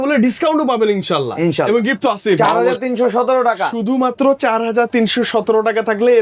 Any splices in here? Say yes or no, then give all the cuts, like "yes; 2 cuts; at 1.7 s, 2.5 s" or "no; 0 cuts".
yes; 1 cut; at 2.4 s